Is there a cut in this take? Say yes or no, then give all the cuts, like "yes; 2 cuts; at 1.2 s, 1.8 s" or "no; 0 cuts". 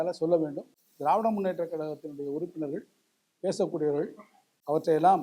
no; 0 cuts